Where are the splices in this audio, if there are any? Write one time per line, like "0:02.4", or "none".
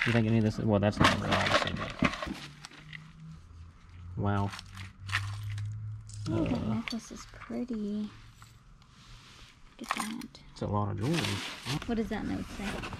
0:02.3
0:11.8